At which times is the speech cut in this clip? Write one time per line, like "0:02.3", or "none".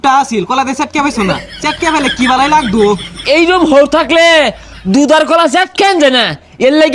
none